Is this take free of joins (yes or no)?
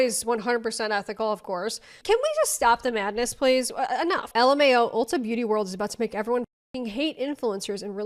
yes